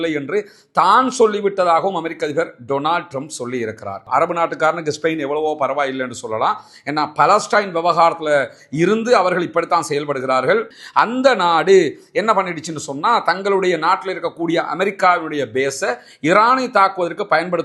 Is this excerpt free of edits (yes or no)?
no